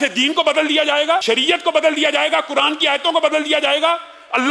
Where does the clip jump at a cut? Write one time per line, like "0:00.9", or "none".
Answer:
0:01.2